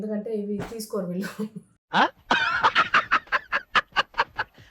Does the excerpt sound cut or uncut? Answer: uncut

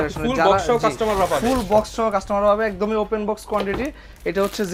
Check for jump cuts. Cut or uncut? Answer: uncut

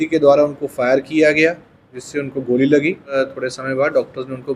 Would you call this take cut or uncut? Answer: cut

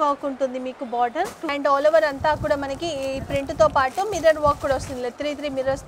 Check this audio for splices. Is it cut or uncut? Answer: cut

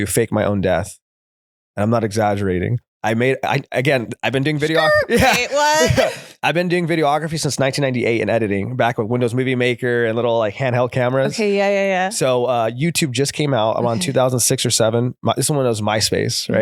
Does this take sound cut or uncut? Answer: uncut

